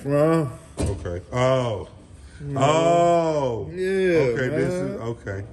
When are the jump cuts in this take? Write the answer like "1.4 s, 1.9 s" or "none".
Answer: none

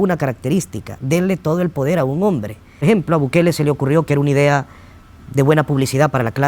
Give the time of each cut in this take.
2.8 s

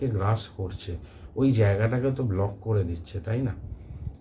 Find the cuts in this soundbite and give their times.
none

